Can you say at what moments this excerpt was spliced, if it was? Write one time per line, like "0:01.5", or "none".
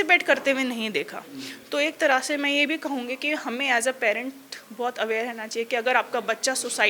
none

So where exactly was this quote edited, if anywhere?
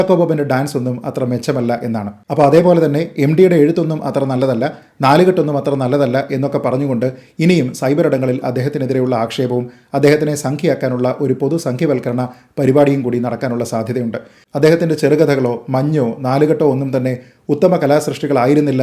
0:14.4

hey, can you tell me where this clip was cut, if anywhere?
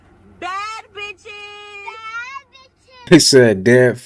0:03.1

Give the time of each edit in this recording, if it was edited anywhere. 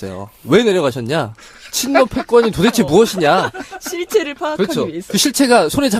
0:03.1

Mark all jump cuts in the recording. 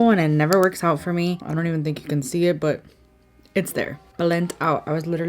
0:01.4
0:04.0

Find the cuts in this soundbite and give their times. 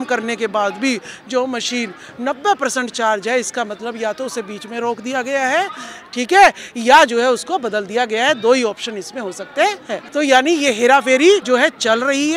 0:10.0
0:11.4

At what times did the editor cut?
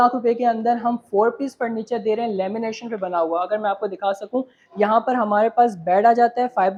none

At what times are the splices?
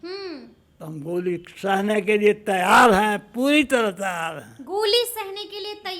none

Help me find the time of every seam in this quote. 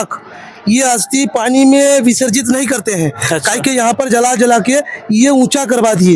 none

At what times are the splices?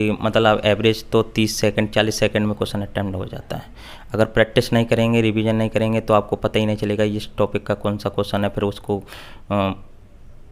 none

